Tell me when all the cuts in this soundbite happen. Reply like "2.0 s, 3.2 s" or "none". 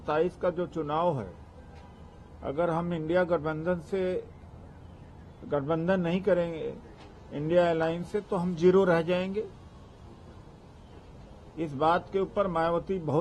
none